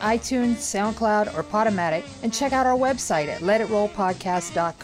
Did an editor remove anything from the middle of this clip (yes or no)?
no